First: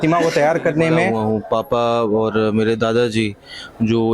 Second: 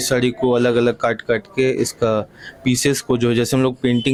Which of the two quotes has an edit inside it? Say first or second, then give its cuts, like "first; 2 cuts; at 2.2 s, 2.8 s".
first; 1 cut; at 1.1 s